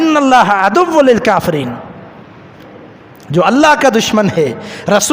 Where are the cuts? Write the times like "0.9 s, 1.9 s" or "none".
2.7 s